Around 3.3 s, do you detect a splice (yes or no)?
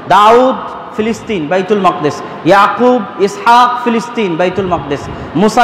no